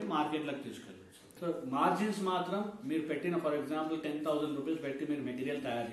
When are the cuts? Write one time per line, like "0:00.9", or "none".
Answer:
0:01.3